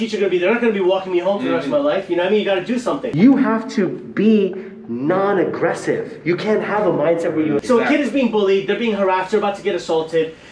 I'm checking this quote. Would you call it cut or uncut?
cut